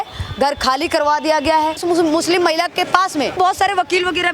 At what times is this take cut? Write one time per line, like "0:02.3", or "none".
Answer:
0:01.8
0:03.4